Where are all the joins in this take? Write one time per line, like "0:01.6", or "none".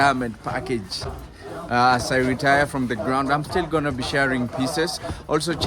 none